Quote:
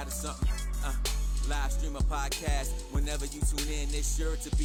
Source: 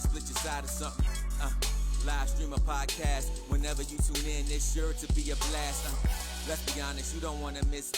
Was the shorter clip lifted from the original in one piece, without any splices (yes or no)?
yes